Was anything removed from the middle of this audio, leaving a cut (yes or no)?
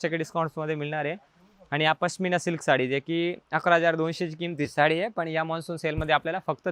no